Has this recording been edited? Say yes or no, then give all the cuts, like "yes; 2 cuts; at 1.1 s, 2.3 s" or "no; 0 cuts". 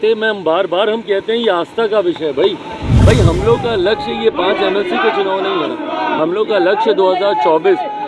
yes; 1 cut; at 2.9 s